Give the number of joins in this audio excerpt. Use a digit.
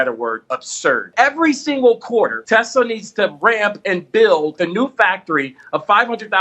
3